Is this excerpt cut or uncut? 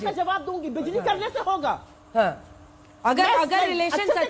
uncut